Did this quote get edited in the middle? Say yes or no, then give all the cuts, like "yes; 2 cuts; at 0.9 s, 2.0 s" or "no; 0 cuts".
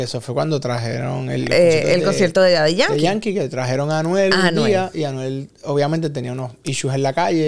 no; 0 cuts